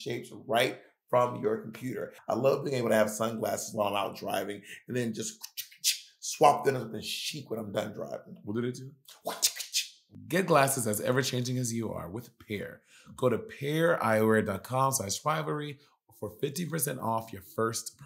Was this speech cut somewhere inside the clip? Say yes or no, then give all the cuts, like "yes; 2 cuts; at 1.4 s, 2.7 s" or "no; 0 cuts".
yes; 2 cuts; at 2.1 s, 10.0 s